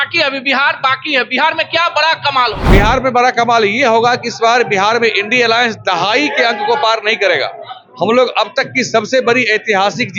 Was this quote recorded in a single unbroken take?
yes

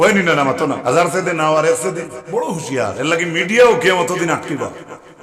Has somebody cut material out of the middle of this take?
yes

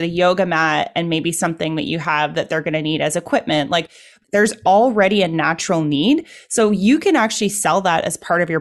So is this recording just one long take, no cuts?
no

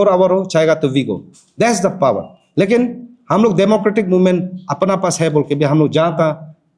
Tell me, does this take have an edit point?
no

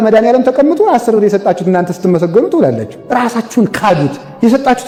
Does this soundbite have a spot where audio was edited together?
no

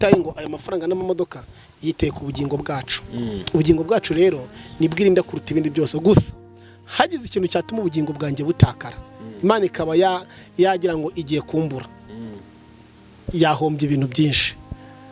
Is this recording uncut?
yes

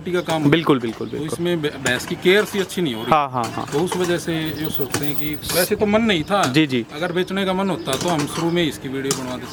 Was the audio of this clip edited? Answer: no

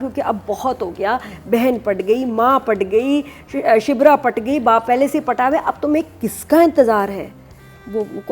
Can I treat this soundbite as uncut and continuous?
yes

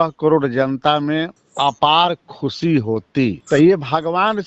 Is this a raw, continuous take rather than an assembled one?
no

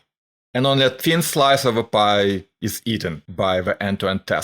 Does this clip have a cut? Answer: yes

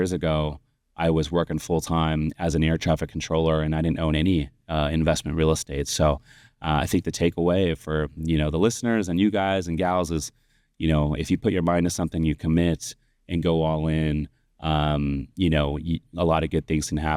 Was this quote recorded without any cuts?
yes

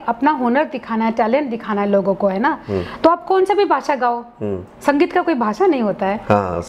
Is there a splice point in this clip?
no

